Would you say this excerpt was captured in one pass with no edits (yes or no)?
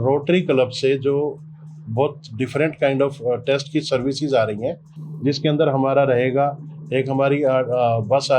yes